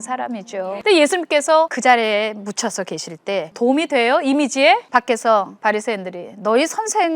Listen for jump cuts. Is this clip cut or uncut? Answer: cut